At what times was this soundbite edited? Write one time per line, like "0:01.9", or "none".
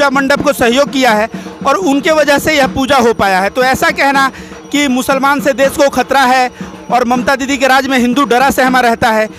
none